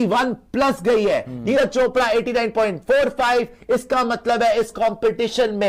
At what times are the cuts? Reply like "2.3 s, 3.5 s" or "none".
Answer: none